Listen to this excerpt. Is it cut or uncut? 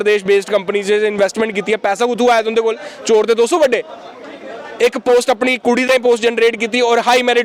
uncut